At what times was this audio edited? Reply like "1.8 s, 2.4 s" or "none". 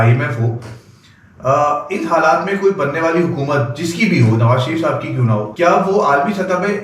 5.5 s